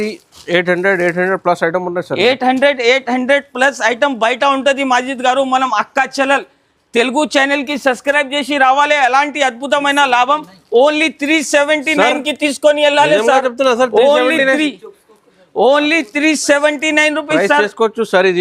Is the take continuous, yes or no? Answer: yes